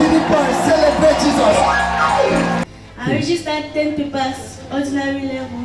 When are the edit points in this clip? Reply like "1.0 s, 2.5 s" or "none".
2.6 s